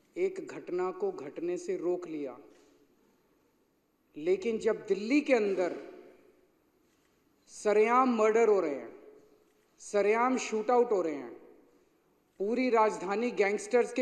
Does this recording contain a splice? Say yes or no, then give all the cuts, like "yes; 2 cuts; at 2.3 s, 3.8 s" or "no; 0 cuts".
no; 0 cuts